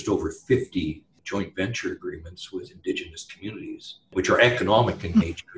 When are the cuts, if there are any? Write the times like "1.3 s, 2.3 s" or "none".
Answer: 1.1 s, 3.9 s